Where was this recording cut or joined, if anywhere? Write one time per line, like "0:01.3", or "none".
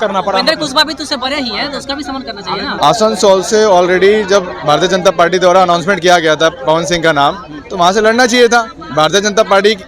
0:02.8